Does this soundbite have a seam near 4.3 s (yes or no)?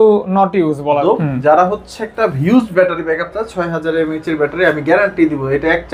no